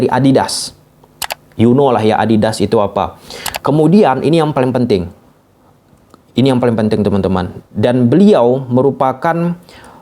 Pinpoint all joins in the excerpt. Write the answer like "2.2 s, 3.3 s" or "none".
none